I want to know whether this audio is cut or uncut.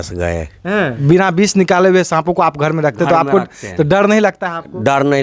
cut